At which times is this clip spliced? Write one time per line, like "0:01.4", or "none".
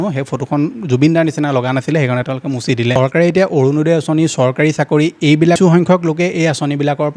0:02.9
0:05.6